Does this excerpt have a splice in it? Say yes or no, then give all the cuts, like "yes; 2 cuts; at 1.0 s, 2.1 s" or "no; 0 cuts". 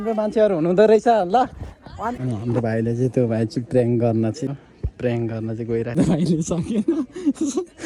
yes; 3 cuts; at 2.2 s, 4.5 s, 6.0 s